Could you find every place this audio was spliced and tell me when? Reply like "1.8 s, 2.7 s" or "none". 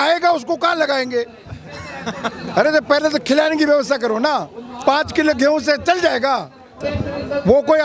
6.8 s